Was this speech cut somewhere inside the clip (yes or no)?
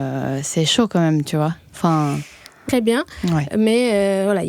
yes